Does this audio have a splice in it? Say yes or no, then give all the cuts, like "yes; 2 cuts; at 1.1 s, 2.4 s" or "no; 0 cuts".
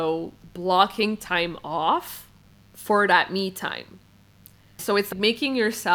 yes; 1 cut; at 5.0 s